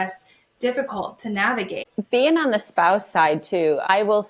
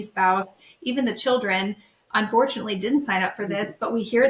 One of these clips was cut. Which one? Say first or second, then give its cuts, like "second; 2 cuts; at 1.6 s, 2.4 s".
first; 1 cut; at 1.9 s